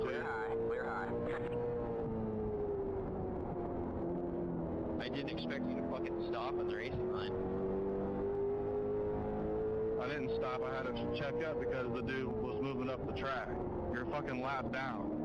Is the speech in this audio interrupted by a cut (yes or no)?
no